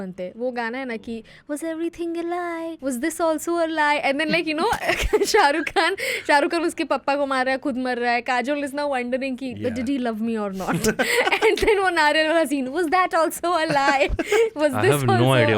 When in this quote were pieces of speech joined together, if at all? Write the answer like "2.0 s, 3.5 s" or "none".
2.8 s

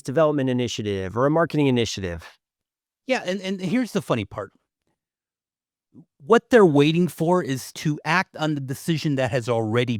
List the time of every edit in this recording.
7.7 s

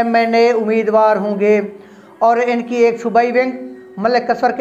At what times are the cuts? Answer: none

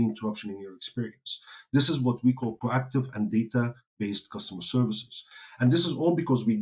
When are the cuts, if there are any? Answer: 2.6 s

